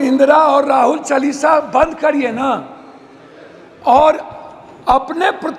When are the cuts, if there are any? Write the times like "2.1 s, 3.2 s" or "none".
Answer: none